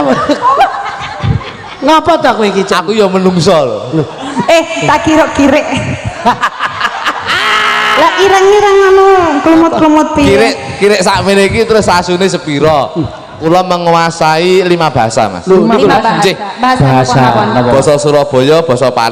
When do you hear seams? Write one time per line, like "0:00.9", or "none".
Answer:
0:13.3